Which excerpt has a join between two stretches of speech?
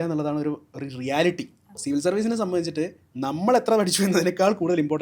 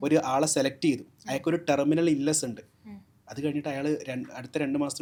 first; 1 cut; at 1.8 s

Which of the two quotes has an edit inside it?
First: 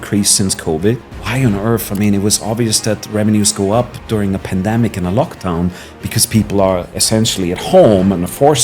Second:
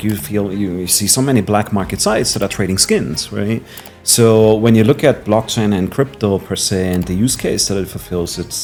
first; 1 cut; at 1.0 s

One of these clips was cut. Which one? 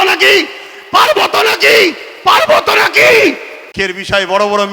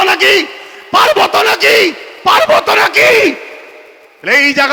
first; 1 cut; at 3.7 s

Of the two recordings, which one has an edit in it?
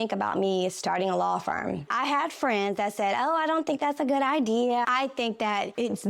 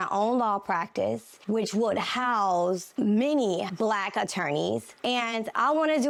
first; 2 cuts; at 1.9 s, 4.9 s

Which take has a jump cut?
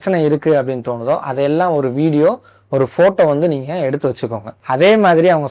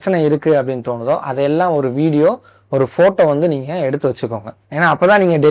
first; 1 cut; at 4.6 s

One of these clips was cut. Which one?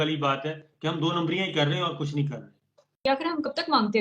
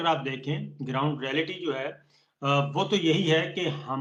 first; 1 cut; at 3.0 s

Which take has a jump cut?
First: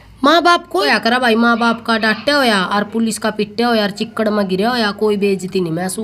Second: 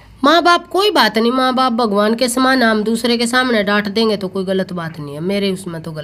first; 1 cut; at 0.9 s

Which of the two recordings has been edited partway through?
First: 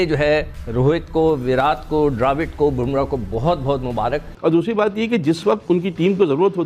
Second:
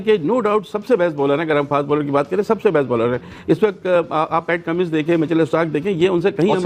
first; 1 cut; at 4.3 s

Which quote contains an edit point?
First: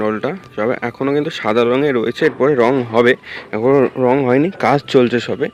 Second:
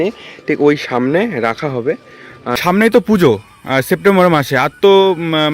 second; 1 cut; at 2.6 s

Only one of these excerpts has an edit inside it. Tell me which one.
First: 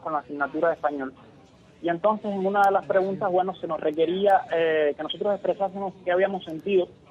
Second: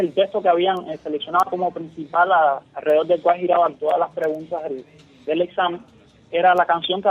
second; 1 cut; at 2.2 s

